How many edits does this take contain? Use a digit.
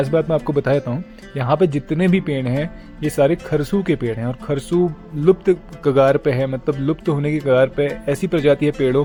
0